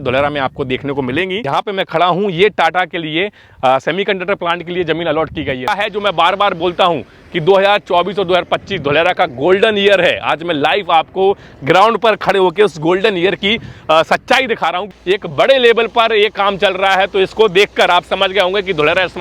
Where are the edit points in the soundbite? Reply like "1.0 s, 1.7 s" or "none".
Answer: 1.4 s, 5.7 s, 14.9 s